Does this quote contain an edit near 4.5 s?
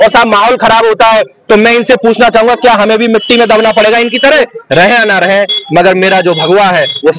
yes; 1 cut; at 4.5 s

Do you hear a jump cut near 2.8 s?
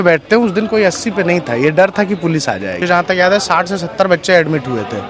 yes; 1 cut; at 2.8 s

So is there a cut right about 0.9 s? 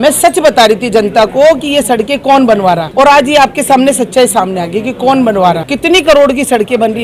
no; 2 cuts; at 2.9 s, 5.7 s

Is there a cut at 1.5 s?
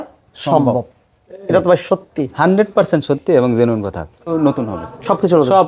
no; 1 cut; at 4.2 s

